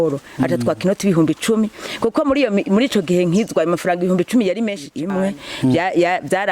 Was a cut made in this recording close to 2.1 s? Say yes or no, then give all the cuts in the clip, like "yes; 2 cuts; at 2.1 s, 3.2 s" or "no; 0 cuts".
no; 1 cut; at 4.9 s